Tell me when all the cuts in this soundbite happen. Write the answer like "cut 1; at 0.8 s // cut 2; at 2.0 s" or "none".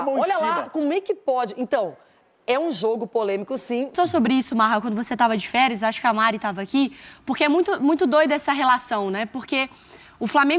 cut 1; at 3.9 s